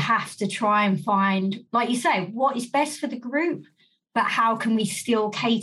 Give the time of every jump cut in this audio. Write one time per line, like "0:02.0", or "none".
0:01.6